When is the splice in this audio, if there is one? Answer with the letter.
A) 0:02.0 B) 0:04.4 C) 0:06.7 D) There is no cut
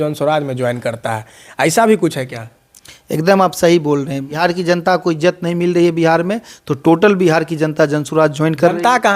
B